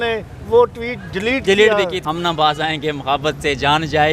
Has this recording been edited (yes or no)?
yes